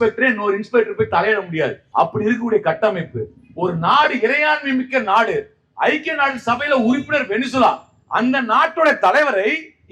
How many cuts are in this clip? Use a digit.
1